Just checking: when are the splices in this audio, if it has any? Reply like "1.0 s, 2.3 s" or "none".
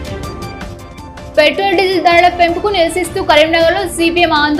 1.3 s

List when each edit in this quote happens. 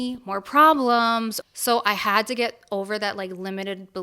1.4 s

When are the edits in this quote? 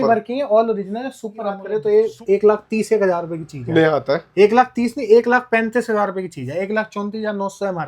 1.7 s

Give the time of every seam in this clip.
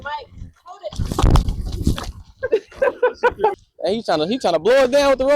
3.6 s

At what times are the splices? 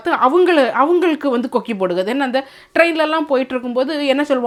none

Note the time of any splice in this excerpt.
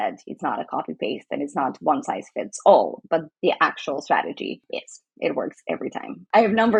none

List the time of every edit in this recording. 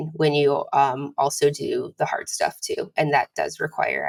none

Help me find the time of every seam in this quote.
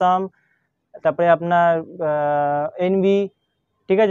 none

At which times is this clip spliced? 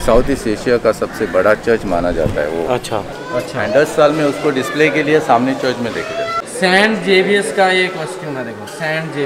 3.1 s, 6.4 s

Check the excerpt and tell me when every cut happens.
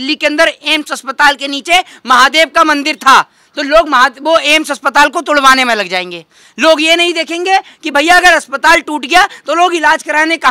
none

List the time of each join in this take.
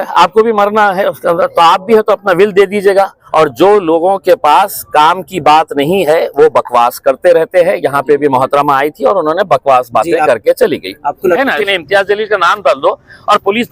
3.2 s, 11.4 s

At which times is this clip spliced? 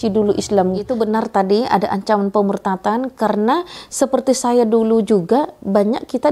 0.9 s

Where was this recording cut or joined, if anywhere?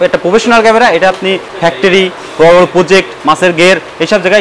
none

